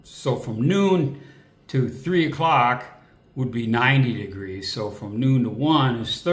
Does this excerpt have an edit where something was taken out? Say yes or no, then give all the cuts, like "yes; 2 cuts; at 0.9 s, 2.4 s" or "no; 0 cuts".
no; 0 cuts